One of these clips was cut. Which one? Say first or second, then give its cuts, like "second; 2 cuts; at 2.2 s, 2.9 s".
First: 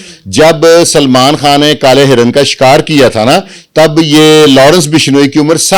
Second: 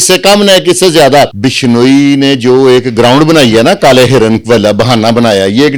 second; 1 cut; at 1.4 s